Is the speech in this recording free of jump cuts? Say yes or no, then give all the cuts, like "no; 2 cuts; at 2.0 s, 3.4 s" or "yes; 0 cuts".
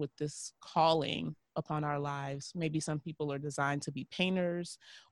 yes; 0 cuts